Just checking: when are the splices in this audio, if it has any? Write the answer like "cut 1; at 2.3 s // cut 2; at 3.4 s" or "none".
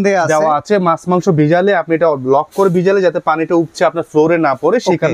none